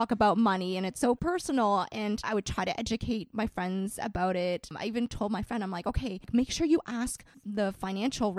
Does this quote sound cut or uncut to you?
cut